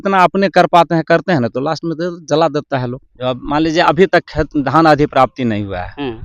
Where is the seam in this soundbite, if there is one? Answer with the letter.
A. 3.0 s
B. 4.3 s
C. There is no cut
A